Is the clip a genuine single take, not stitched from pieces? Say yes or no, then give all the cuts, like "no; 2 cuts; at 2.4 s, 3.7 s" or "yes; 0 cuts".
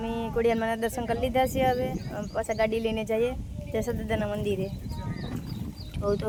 yes; 0 cuts